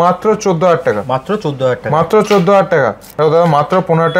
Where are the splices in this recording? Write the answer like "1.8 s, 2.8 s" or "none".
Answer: 3.0 s